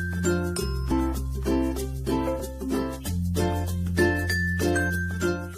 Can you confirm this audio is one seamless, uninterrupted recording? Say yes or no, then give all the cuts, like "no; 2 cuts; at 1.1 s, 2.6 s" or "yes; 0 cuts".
yes; 0 cuts